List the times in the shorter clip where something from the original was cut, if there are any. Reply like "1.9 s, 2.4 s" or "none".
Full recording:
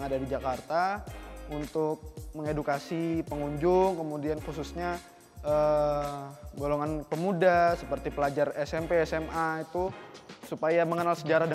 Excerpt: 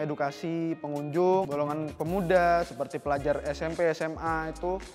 1.5 s